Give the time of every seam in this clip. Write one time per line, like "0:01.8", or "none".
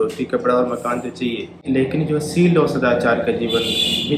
0:01.6